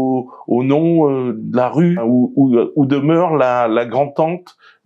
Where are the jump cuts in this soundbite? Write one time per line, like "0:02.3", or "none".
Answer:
0:02.0